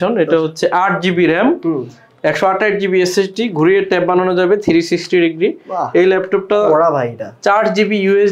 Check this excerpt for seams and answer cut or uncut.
uncut